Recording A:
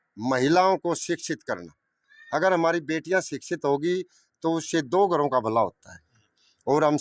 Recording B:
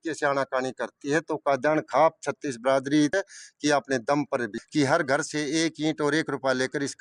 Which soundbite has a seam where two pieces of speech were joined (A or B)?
B